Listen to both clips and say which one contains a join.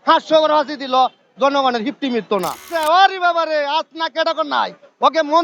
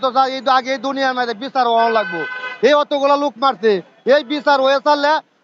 first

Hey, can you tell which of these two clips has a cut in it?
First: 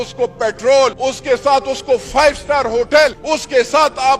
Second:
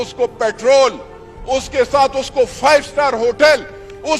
first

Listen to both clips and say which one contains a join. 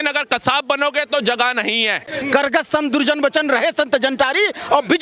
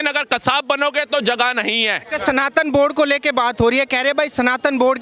first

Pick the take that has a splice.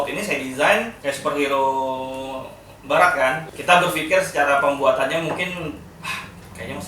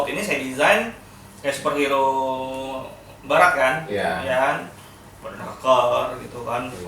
first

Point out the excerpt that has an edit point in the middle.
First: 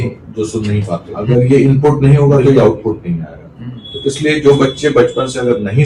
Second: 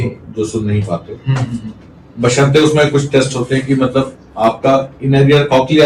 first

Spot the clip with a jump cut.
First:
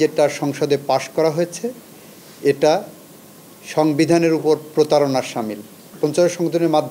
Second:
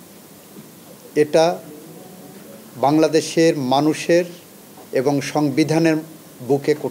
first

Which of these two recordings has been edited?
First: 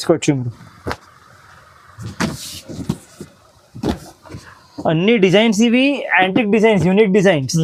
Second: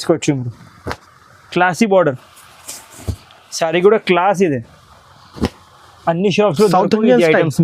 second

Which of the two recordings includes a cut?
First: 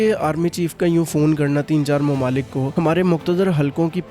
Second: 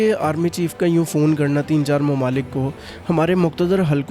first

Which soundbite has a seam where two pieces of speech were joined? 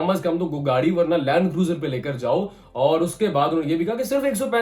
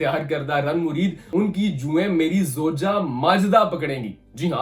second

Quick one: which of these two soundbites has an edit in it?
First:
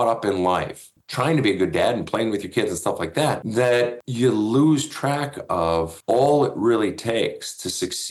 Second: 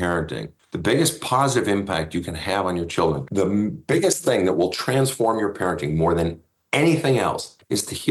first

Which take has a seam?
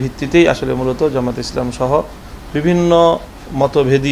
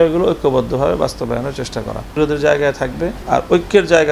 second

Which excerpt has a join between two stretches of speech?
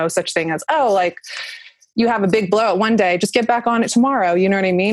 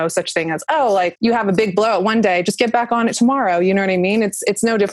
second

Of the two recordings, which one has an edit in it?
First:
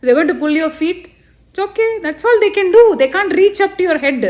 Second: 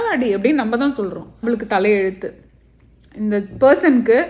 second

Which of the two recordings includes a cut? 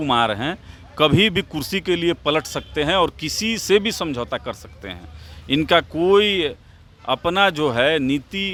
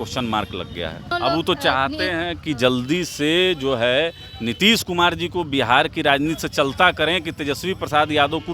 second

